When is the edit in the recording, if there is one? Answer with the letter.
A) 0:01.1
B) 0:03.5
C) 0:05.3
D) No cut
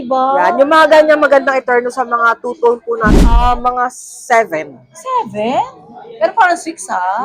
B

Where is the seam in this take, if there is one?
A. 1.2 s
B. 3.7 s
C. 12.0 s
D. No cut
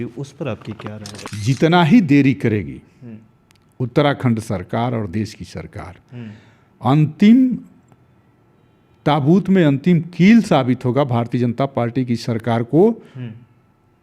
A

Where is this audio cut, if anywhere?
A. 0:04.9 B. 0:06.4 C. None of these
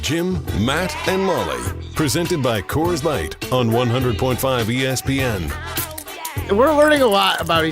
B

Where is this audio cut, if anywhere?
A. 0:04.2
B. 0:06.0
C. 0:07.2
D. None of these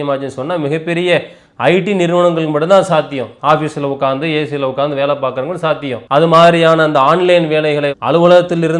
B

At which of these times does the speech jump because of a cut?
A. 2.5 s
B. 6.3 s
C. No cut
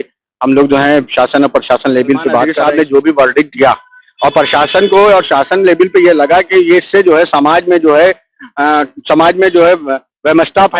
A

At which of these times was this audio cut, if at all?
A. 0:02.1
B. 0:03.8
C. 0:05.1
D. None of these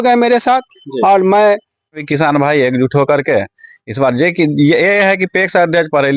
A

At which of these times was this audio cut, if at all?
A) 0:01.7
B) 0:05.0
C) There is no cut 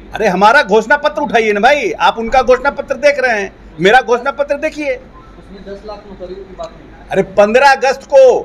C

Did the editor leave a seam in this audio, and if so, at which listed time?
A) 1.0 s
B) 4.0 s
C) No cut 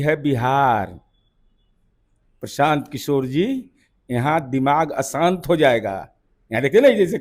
C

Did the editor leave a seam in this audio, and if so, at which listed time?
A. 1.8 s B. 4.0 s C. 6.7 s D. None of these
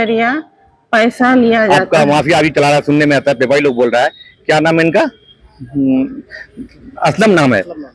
A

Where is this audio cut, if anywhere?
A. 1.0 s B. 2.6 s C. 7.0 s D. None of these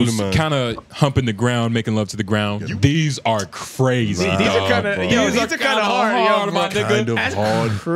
B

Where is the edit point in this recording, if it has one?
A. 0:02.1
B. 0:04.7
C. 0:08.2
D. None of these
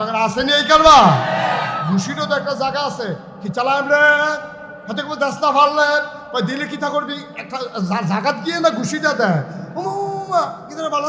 D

